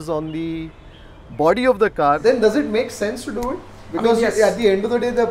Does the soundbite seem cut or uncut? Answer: cut